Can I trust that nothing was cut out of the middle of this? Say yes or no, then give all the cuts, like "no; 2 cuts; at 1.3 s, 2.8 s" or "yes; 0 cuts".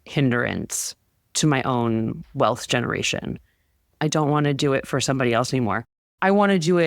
no; 1 cut; at 3.8 s